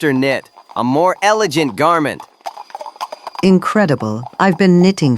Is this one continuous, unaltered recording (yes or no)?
no